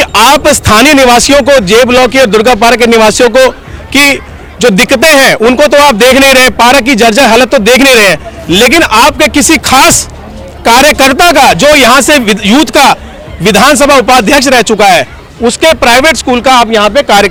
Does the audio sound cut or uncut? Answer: uncut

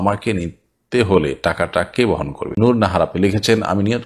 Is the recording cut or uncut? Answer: cut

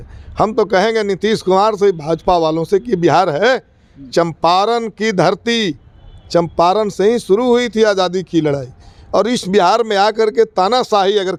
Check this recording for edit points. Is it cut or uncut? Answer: uncut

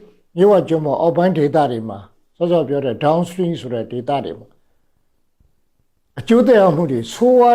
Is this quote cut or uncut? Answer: uncut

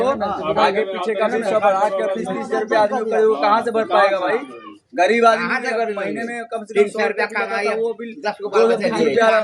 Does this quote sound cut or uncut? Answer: uncut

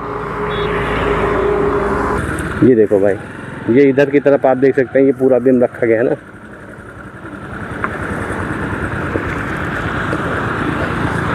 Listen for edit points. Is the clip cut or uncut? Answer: cut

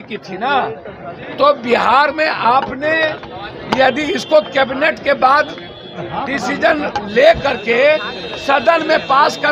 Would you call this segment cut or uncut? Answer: uncut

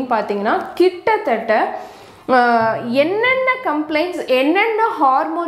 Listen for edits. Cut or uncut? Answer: uncut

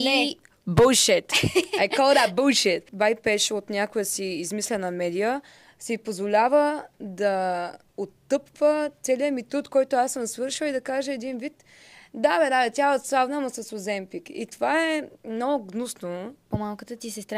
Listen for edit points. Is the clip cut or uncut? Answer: cut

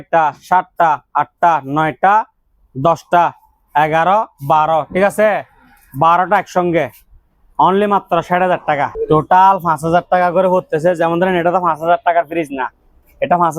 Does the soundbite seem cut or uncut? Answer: cut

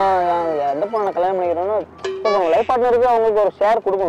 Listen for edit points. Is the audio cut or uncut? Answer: uncut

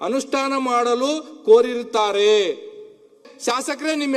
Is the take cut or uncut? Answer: cut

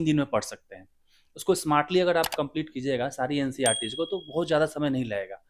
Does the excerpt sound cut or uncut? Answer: uncut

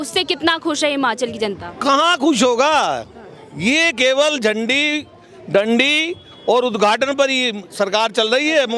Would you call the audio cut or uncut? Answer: uncut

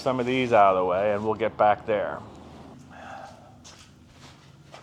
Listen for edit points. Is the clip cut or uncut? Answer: uncut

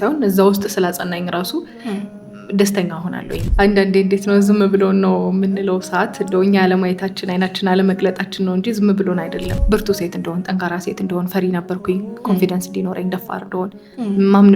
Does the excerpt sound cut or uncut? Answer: cut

